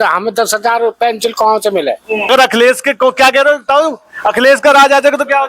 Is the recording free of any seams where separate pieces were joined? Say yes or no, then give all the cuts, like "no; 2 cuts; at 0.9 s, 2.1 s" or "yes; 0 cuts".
no; 1 cut; at 2.3 s